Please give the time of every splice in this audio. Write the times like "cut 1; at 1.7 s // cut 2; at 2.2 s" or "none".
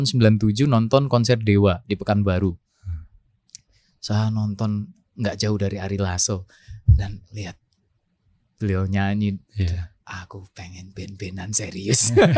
none